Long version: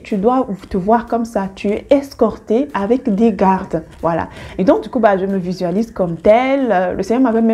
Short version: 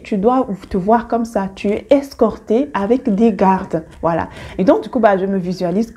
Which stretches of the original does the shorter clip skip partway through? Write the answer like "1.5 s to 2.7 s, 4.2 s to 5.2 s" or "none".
none